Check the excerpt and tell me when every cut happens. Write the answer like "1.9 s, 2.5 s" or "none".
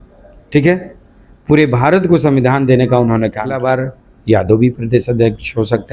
3.6 s